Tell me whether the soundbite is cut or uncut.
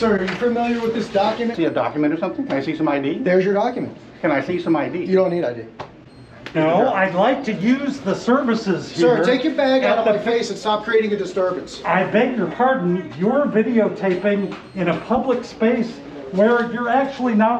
cut